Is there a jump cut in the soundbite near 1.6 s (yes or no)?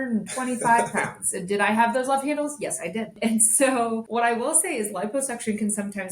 no